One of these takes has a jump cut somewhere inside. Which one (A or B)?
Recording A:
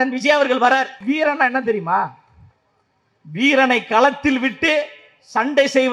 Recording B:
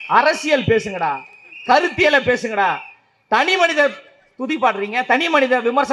A